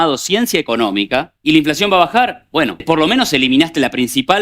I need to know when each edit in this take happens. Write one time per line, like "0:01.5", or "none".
0:01.3
0:02.8